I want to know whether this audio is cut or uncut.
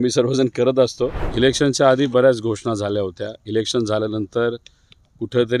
cut